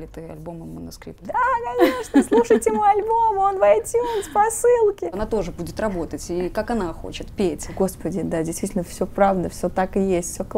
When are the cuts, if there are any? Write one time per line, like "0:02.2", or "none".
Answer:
0:01.1
0:05.2
0:07.7